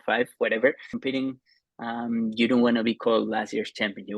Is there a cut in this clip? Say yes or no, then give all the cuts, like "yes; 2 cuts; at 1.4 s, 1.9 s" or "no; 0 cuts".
yes; 1 cut; at 0.9 s